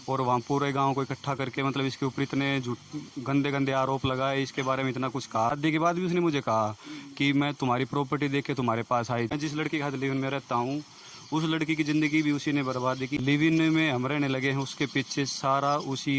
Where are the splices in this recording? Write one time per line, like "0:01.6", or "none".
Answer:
0:05.5
0:09.3
0:13.2